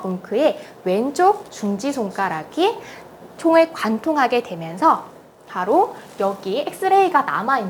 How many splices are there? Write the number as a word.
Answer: zero